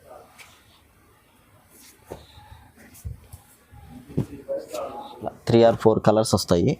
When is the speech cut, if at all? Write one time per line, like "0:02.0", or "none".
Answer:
0:05.4

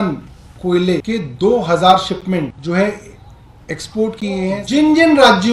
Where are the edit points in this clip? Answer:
0:01.0
0:02.6
0:04.6

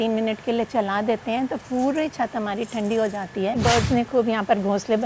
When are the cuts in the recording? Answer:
0:03.6

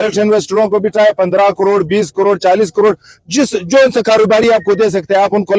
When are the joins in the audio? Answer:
none

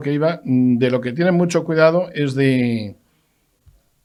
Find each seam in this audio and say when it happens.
none

